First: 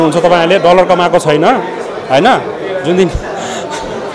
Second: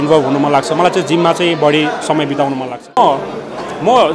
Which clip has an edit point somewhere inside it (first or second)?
second